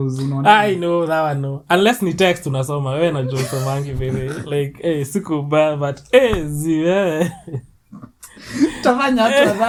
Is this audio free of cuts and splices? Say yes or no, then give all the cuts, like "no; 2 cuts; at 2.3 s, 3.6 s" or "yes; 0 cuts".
yes; 0 cuts